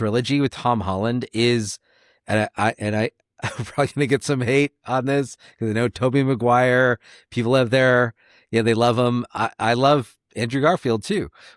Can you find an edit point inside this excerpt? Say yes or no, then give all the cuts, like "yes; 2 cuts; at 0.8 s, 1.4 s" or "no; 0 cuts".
no; 0 cuts